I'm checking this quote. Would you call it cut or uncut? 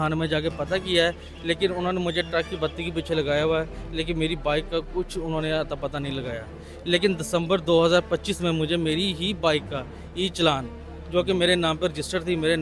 uncut